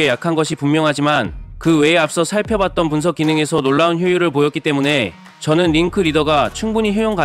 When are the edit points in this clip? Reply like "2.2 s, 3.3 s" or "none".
none